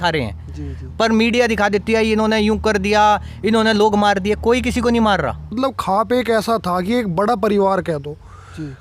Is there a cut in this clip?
yes; 1 cut; at 5.6 s

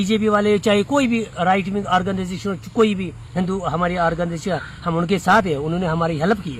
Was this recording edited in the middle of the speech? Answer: no; 0 cuts

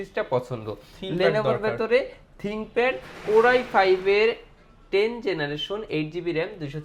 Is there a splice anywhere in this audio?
no; 0 cuts

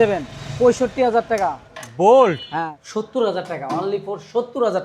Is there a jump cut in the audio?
yes; 1 cut; at 2.8 s

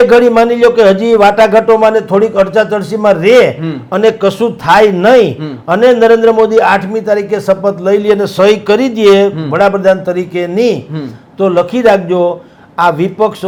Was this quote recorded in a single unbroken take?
yes; 0 cuts

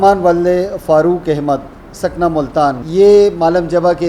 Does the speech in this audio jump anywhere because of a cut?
yes; 1 cut; at 2.8 s

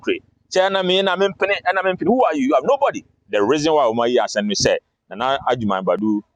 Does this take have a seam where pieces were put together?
yes; 1 cut; at 3.2 s

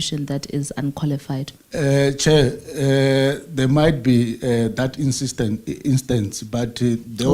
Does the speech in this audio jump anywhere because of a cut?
yes; 1 cut; at 1.5 s

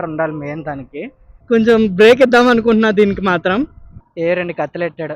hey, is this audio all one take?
no; 2 cuts; at 1.4 s, 3.8 s

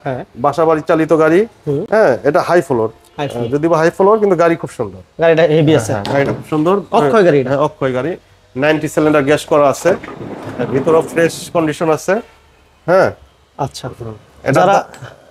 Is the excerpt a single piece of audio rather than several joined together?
yes; 0 cuts

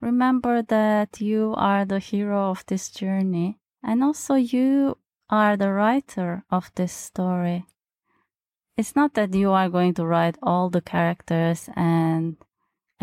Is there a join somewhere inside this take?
yes; 1 cut; at 3.7 s

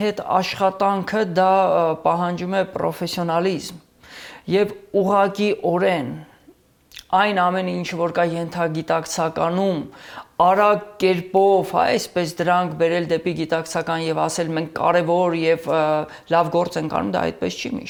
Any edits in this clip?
no; 0 cuts

